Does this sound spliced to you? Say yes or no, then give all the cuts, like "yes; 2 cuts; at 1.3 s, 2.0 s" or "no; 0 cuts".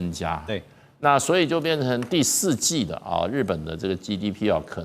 no; 0 cuts